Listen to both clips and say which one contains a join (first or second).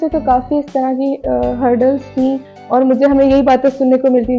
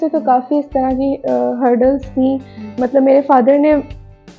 first